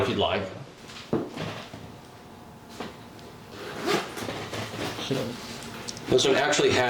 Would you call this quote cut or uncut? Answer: uncut